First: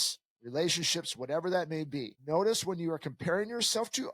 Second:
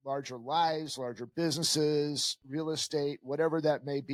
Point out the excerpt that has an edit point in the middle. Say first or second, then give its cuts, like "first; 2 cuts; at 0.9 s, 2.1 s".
first; 1 cut; at 2.1 s